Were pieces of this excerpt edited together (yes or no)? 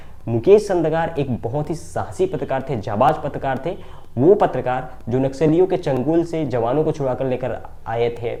no